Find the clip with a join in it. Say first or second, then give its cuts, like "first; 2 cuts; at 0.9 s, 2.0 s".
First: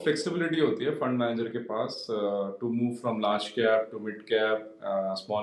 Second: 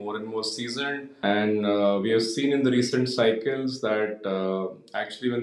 second; 1 cut; at 1.1 s